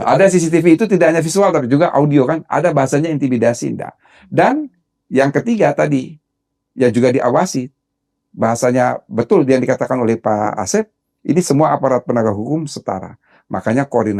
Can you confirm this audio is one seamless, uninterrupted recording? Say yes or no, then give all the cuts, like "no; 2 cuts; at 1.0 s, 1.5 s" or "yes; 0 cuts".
yes; 0 cuts